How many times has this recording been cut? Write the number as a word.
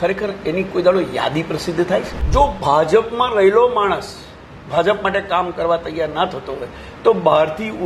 one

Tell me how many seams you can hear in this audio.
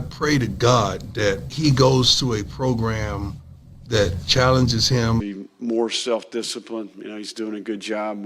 two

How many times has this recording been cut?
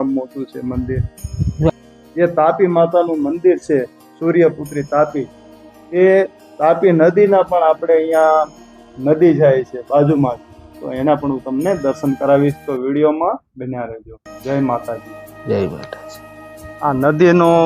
two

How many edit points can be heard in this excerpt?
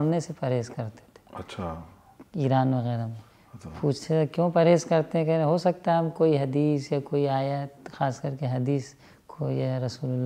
zero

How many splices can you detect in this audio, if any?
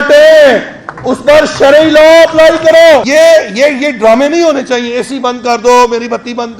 one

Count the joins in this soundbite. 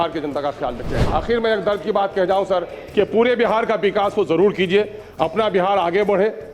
one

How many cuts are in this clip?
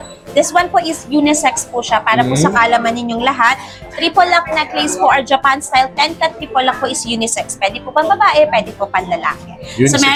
zero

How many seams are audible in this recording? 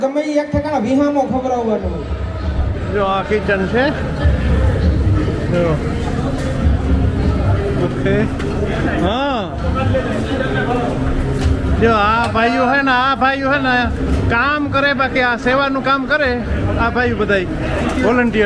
one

